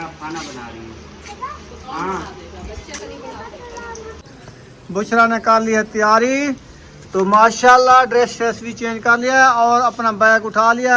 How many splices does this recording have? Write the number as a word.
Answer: one